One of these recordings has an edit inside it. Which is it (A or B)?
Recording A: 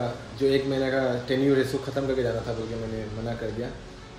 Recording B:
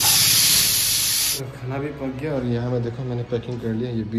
B